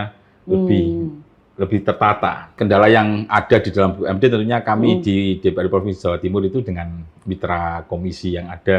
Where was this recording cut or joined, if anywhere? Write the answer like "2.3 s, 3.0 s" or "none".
2.6 s